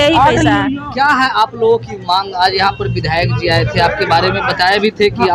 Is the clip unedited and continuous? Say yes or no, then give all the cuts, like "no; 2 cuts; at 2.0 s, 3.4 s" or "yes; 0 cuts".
yes; 0 cuts